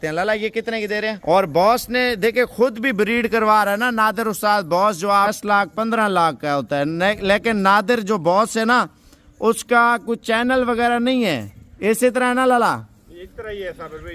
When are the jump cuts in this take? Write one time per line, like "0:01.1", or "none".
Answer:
0:01.2
0:05.3